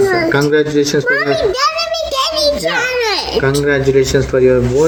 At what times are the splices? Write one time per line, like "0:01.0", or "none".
none